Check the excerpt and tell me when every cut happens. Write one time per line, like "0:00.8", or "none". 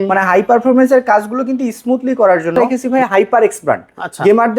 0:02.8